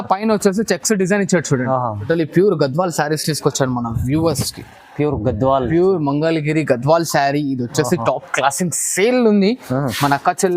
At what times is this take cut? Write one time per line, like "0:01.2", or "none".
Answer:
0:02.1